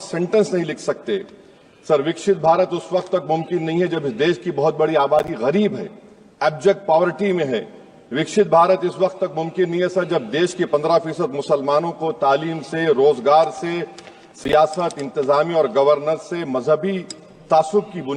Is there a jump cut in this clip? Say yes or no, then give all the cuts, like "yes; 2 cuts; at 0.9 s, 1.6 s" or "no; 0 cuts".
no; 0 cuts